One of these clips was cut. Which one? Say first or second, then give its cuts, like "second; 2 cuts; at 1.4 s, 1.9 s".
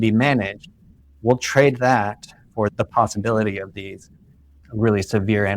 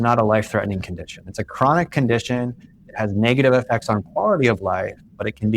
first; 1 cut; at 2.7 s